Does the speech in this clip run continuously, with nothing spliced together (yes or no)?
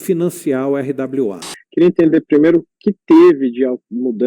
no